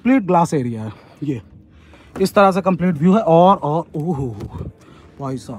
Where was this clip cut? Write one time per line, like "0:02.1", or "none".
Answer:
none